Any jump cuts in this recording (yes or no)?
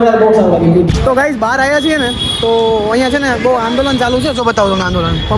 yes